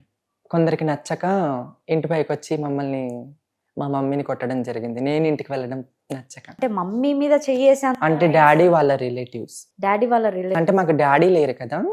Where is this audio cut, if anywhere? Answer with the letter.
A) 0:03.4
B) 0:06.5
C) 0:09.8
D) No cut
B